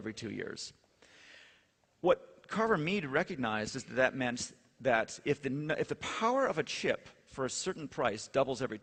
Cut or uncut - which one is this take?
uncut